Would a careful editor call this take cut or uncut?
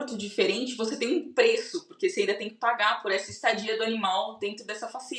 uncut